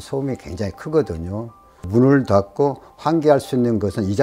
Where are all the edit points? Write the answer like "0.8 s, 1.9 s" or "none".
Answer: none